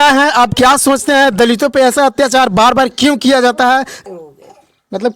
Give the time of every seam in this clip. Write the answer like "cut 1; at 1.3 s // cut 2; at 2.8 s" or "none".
cut 1; at 4.0 s